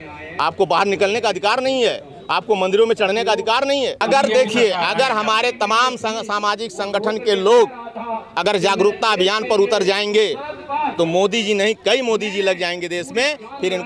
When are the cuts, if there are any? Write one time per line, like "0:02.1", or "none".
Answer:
0:04.0